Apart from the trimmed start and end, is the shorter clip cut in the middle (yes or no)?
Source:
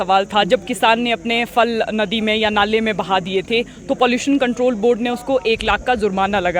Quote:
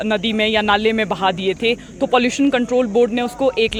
no